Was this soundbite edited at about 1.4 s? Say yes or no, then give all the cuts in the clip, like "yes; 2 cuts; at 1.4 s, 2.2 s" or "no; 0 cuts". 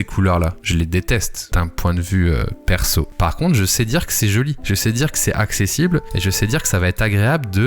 yes; 1 cut; at 1.4 s